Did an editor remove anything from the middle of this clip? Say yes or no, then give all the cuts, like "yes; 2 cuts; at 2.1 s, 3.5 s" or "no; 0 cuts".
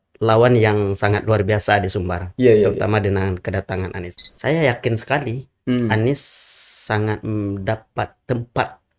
yes; 1 cut; at 4.1 s